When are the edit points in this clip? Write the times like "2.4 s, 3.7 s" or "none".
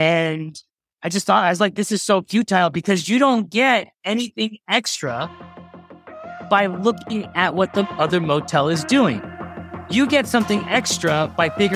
none